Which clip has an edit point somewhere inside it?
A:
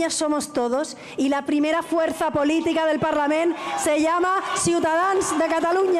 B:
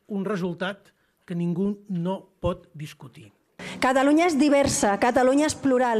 B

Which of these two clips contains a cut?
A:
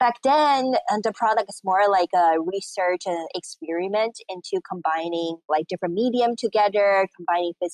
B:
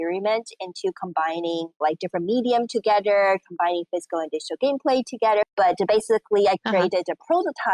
B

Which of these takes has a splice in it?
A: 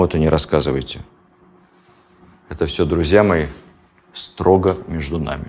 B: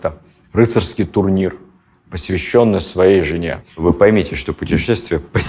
B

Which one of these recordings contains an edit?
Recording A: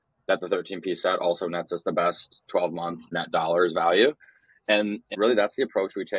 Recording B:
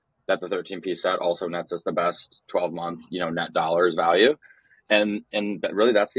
A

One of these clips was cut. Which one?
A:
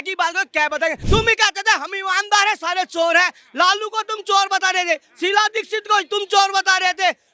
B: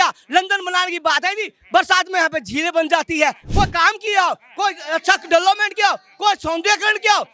A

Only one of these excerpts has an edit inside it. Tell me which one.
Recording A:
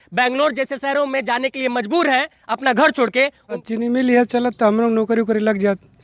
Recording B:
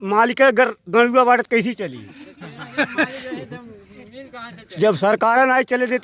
A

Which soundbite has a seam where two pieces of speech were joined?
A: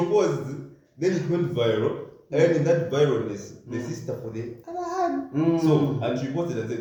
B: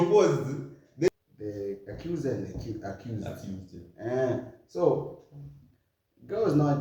B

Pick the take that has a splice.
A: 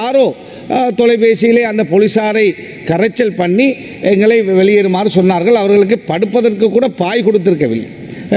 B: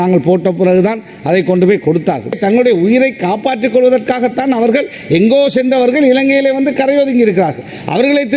B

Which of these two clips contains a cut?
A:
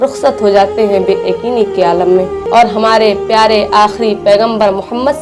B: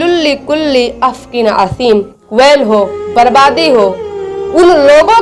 A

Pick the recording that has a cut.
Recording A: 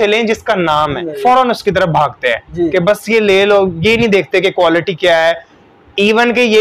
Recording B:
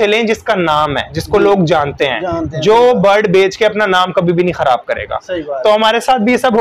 A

